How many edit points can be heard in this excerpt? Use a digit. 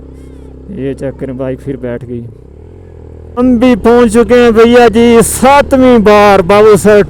1